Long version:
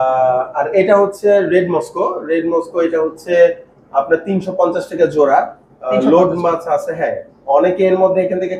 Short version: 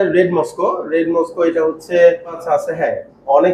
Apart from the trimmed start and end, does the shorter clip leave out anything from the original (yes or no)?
yes